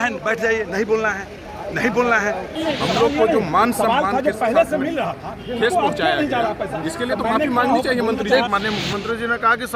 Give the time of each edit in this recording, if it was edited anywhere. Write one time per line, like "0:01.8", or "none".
0:02.5
0:08.5